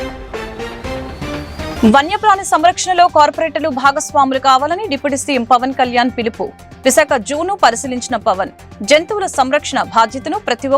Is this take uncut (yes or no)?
no